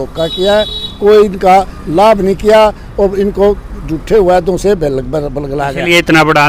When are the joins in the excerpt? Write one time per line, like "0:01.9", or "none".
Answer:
none